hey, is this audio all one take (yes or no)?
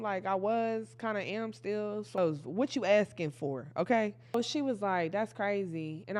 no